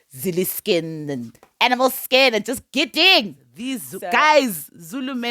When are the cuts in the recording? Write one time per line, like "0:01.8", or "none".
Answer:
0:04.0